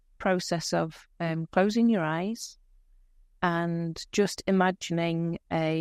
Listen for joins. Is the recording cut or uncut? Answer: uncut